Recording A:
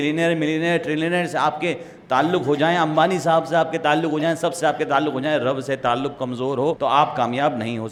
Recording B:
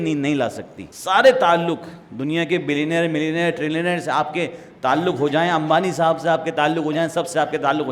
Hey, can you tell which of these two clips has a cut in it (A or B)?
B